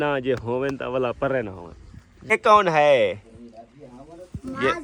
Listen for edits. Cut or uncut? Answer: cut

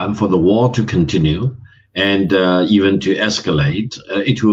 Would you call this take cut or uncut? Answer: uncut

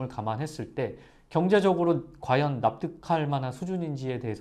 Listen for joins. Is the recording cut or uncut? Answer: uncut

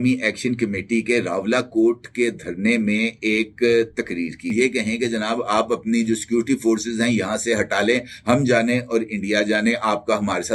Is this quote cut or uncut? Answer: cut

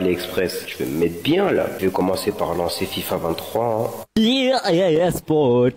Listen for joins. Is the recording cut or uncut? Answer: cut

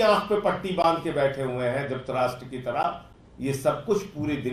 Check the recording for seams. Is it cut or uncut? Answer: uncut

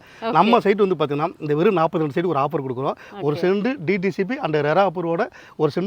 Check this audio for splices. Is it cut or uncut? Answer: uncut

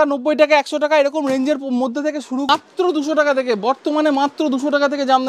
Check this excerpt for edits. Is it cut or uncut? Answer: cut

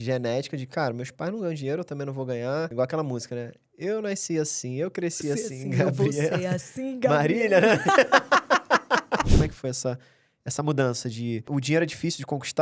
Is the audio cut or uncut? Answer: cut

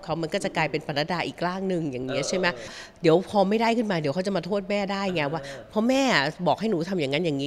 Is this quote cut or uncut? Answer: cut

